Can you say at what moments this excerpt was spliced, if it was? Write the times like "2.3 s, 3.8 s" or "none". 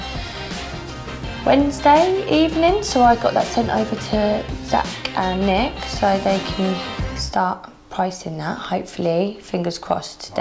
none